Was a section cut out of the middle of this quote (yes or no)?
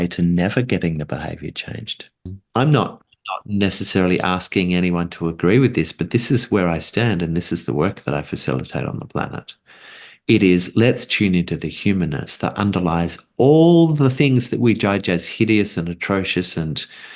yes